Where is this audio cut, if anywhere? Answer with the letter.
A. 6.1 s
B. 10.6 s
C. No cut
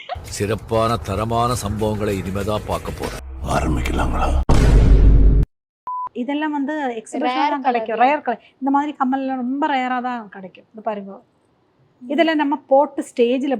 A